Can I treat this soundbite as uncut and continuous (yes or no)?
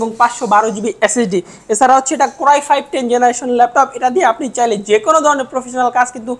yes